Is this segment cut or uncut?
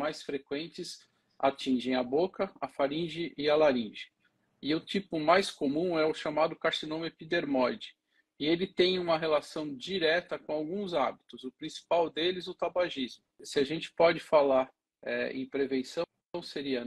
cut